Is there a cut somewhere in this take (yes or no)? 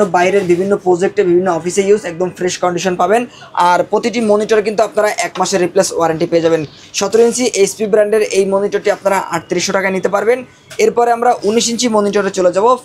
no